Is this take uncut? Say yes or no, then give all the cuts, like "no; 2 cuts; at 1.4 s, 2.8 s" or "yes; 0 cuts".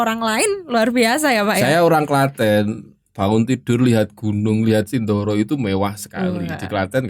yes; 0 cuts